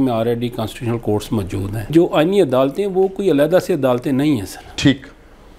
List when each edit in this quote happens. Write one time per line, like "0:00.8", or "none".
0:01.9